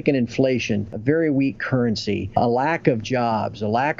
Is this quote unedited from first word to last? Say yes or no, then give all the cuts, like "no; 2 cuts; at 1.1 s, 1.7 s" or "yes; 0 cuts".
no; 2 cuts; at 0.9 s, 2.3 s